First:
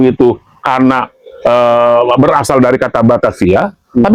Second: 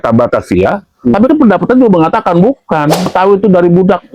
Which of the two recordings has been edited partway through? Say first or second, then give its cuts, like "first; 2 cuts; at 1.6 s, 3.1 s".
second; 1 cut; at 3.1 s